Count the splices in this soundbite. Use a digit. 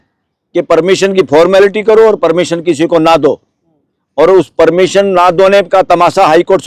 0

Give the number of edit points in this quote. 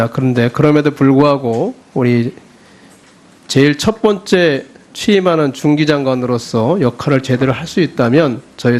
1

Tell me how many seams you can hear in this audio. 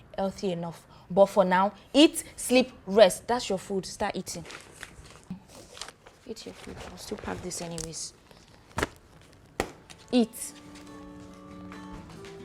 1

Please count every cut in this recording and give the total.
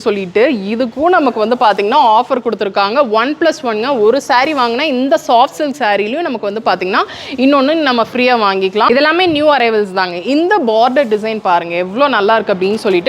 1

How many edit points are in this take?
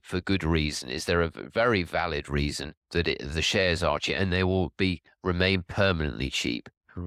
0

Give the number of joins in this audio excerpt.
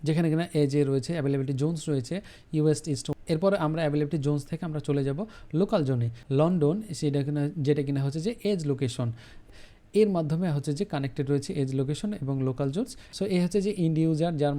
4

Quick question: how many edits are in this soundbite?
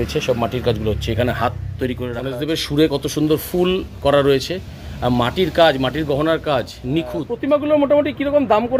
2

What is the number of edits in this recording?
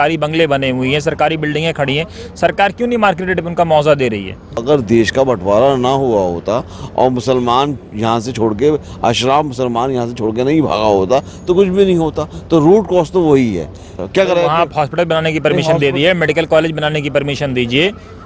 2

